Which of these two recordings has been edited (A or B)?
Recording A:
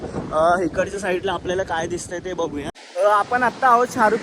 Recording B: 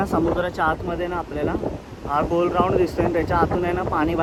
A